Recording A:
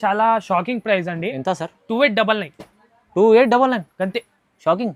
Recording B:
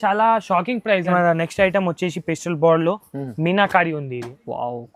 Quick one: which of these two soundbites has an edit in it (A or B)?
B